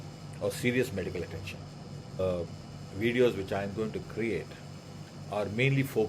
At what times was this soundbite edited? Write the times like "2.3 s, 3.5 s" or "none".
2.2 s